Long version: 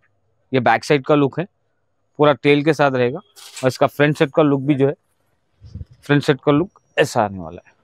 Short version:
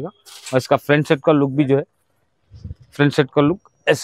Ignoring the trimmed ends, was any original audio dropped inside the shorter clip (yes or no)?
no